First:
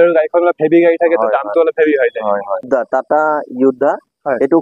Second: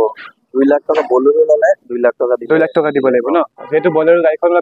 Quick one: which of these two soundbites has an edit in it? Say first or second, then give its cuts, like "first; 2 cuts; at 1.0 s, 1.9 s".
first; 1 cut; at 2.7 s